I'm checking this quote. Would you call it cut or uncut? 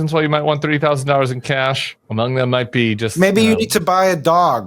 cut